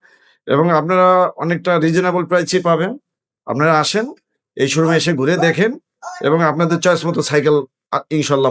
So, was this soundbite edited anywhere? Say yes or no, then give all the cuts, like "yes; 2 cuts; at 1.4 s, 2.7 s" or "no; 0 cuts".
no; 0 cuts